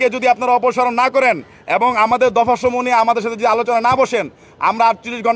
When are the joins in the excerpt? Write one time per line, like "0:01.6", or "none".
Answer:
none